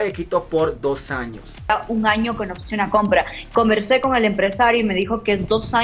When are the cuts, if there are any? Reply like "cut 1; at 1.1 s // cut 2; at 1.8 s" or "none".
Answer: cut 1; at 1.7 s